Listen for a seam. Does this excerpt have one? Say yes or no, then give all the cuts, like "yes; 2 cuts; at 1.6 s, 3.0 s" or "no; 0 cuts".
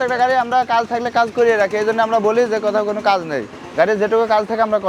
no; 0 cuts